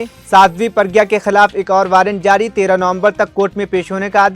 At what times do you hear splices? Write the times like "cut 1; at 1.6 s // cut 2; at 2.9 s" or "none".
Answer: none